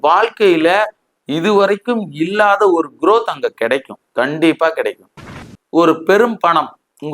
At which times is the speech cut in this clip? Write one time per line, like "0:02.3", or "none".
0:05.4